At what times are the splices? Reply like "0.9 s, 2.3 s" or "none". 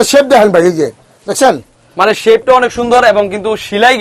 none